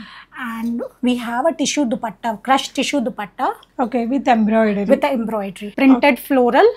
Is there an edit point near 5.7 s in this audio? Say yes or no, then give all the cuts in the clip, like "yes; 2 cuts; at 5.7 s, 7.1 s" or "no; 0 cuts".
yes; 1 cut; at 5.7 s